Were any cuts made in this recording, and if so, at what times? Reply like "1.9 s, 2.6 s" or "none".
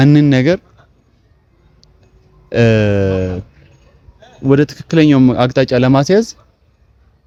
none